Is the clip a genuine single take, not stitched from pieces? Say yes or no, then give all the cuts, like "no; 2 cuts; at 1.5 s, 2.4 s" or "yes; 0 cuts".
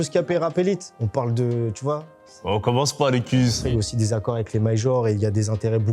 no; 1 cut; at 3.6 s